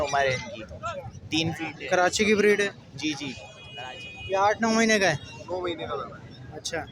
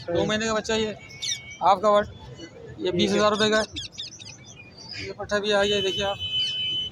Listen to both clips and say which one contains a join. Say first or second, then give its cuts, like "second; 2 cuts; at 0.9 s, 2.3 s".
first; 1 cut; at 3.5 s